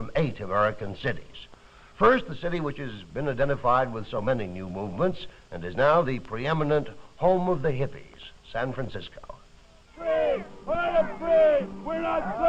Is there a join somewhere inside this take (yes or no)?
yes